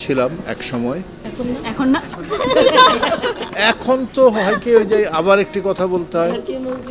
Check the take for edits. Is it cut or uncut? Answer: cut